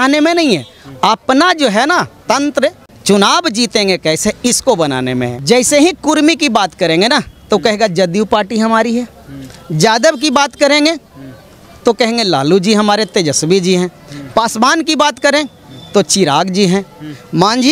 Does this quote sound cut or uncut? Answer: cut